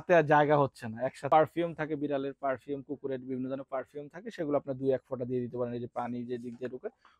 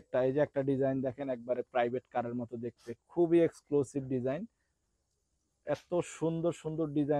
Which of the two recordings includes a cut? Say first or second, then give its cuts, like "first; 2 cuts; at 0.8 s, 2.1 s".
first; 1 cut; at 1.2 s